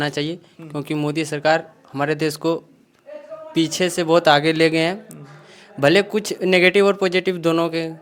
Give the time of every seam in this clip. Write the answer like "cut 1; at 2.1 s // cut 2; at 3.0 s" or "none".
none